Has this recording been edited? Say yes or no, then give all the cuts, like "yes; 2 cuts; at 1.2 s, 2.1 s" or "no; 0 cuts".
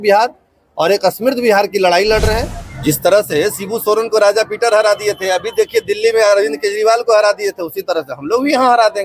yes; 1 cut; at 2.6 s